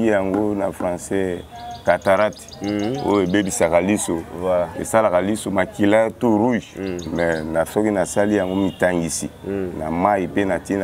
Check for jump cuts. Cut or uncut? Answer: uncut